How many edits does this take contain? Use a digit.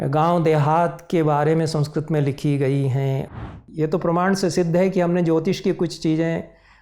1